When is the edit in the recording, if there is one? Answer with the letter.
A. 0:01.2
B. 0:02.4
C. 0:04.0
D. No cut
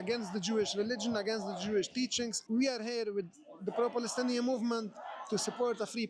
B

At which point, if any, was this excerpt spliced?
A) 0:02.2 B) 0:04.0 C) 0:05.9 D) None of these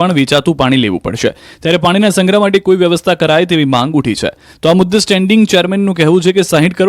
C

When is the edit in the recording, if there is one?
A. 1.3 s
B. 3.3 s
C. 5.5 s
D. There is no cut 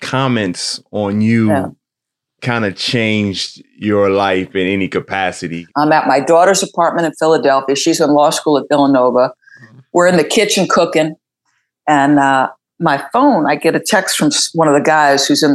C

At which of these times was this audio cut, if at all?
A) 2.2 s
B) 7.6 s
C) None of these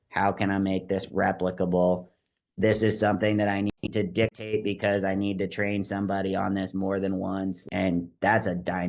B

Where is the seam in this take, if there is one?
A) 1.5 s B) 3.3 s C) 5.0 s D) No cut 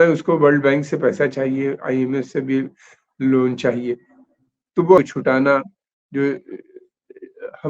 C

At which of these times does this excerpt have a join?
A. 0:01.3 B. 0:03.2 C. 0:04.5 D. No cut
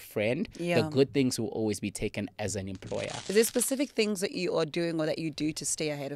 B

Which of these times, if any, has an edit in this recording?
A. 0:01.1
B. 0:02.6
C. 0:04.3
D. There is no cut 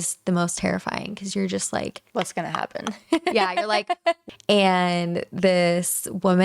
C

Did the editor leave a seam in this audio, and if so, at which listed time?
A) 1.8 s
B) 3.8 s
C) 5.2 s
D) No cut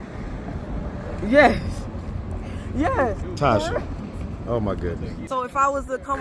C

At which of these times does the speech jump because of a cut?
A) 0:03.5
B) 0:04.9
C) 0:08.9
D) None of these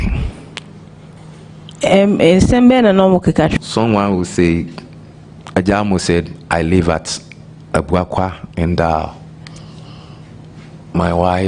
A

